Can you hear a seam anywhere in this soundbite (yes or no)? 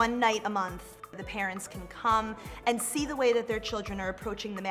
no